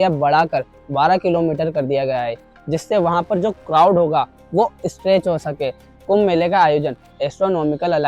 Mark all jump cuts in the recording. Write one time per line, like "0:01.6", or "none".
0:05.9